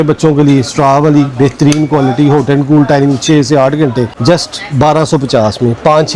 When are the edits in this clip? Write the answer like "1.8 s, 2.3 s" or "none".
4.1 s